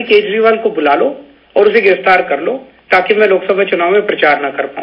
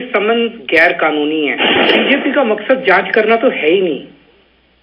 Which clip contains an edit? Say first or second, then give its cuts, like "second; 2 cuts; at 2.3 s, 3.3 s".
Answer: second; 1 cut; at 1.8 s